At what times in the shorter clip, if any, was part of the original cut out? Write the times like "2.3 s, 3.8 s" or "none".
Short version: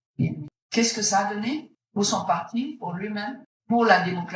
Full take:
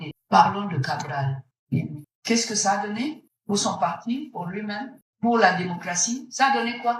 none